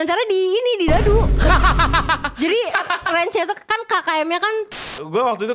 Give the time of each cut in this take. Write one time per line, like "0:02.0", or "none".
0:01.3
0:04.8